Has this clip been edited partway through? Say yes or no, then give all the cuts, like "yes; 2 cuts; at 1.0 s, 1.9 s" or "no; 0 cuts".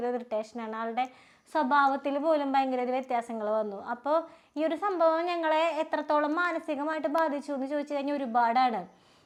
no; 0 cuts